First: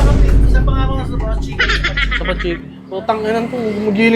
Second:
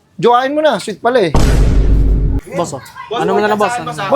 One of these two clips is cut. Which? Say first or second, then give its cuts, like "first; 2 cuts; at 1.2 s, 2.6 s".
second; 1 cut; at 2.4 s